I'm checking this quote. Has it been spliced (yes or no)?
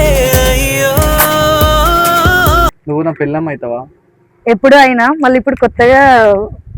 yes